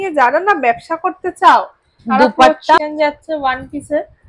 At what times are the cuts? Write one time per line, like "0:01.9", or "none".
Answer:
0:02.8